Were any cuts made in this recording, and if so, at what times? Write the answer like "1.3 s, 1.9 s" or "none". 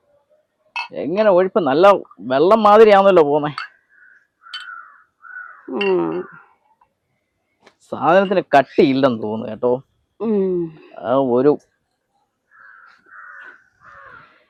none

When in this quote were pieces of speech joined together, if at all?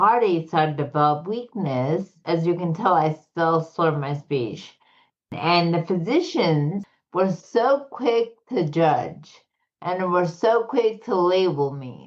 2.2 s, 5.3 s, 6.8 s

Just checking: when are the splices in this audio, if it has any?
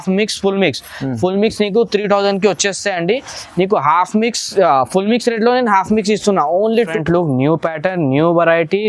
6.9 s

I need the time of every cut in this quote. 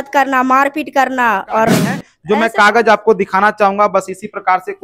2.1 s

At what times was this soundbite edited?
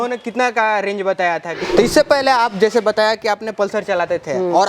1.5 s

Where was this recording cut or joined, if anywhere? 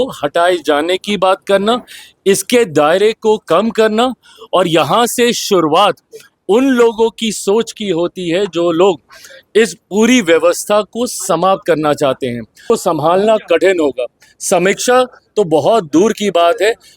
12.6 s

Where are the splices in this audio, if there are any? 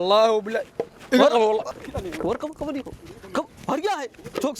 1.7 s

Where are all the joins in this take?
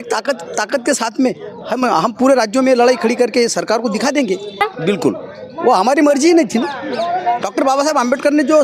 4.7 s

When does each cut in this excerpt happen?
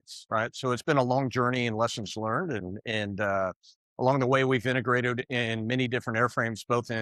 none

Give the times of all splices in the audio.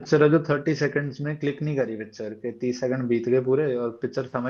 none

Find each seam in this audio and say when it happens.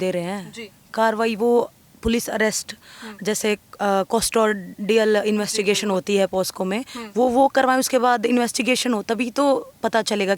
none

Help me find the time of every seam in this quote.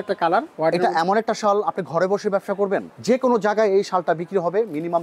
2.9 s

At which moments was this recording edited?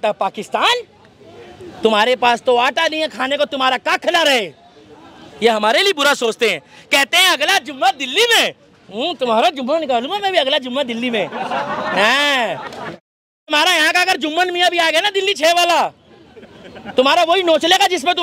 none

